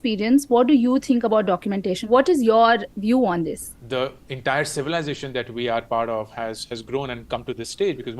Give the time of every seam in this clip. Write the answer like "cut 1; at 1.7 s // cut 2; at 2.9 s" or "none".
cut 1; at 2.0 s // cut 2; at 3.7 s